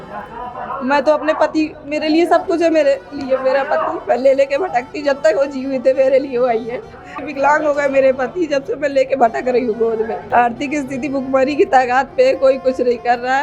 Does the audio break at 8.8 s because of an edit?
no; 2 cuts; at 7.2 s, 10.2 s

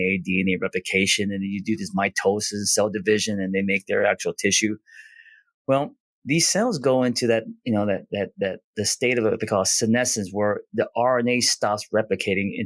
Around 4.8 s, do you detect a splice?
no; 0 cuts

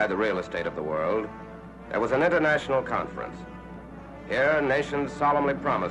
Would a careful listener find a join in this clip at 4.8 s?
no; 1 cut; at 1.3 s

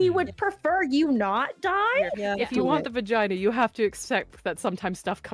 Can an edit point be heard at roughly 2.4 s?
yes; 1 cut; at 2.4 s

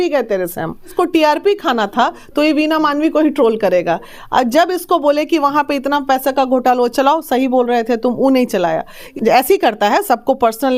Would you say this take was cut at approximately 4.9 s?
no; 2 cuts; at 0.9 s, 9.0 s

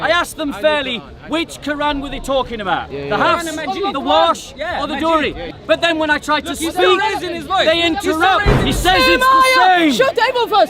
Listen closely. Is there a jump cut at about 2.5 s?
no; 2 cuts; at 5.5 s, 8.6 s

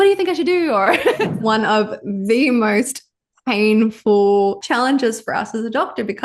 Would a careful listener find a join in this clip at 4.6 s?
yes; 2 cuts; at 1.3 s, 4.6 s

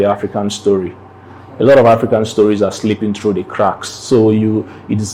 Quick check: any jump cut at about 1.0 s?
no; 0 cuts

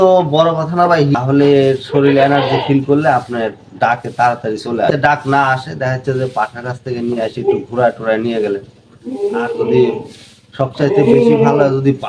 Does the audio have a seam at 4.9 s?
yes; 2 cuts; at 1.1 s, 4.9 s

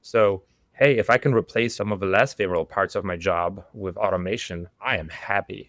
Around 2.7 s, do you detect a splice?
no; 1 cut; at 4.7 s

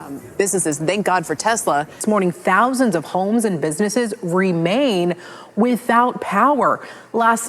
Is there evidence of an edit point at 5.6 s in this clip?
no; 1 cut; at 2.0 s

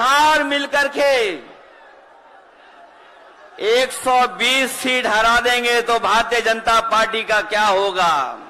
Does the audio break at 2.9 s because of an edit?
no; 0 cuts

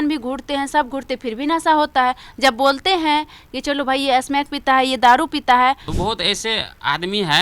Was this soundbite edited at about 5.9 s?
yes; 1 cut; at 5.9 s

